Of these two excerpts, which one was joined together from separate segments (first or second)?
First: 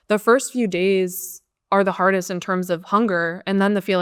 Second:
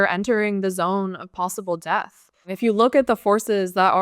second